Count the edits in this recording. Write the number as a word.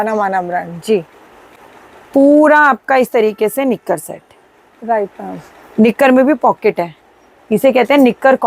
zero